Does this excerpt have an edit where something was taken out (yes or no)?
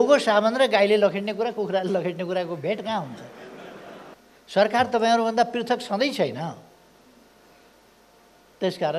yes